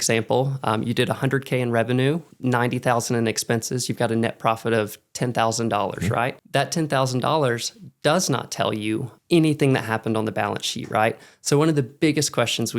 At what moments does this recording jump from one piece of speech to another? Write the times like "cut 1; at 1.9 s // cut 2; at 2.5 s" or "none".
cut 1; at 2.3 s // cut 2; at 6.4 s // cut 3; at 9.1 s